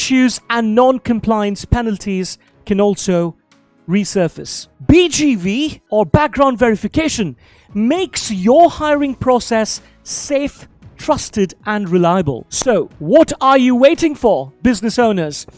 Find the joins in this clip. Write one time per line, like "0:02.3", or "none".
0:12.4